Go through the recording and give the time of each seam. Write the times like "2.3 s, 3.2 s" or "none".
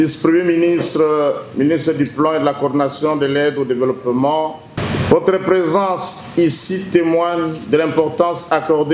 4.8 s